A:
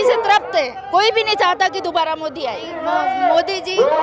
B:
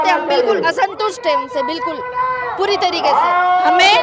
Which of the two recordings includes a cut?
A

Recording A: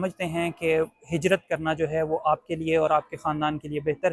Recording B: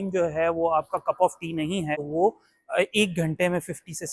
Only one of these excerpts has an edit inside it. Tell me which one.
B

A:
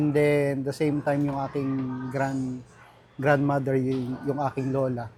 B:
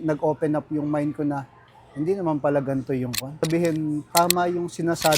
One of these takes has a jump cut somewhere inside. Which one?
B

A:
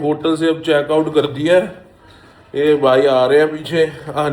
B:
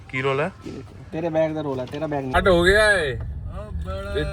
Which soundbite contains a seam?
B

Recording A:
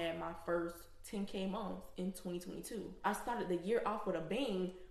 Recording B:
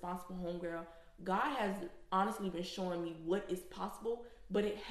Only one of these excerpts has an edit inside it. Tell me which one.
A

